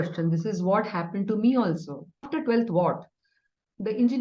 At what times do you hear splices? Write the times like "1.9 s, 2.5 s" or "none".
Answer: 2.3 s